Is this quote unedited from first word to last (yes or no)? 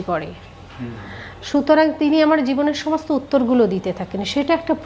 yes